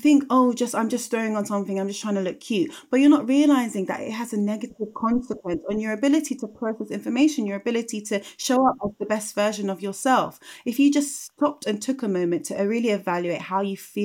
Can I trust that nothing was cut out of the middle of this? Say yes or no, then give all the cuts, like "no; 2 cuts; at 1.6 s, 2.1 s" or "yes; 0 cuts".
yes; 0 cuts